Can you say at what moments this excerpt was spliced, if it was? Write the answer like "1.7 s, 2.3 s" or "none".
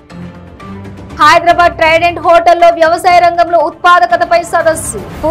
none